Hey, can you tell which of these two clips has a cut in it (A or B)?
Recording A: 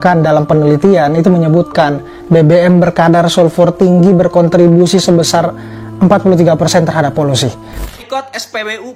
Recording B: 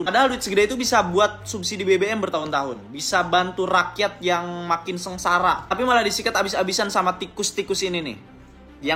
A